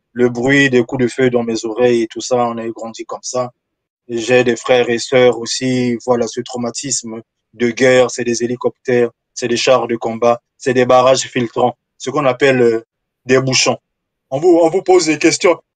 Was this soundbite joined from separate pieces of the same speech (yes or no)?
no